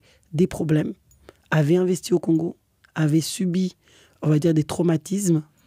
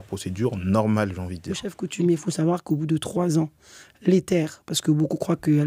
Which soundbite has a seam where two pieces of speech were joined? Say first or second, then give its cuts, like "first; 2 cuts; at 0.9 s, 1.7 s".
second; 1 cut; at 1.8 s